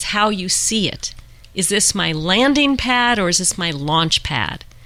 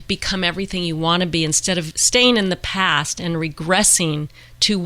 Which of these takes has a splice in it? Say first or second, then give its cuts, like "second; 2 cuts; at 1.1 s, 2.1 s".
second; 1 cut; at 2.0 s